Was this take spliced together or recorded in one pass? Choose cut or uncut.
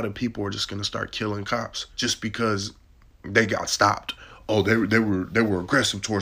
cut